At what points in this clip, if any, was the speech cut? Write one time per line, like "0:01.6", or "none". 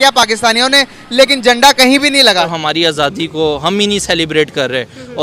0:02.5